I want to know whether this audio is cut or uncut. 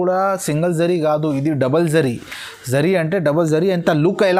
uncut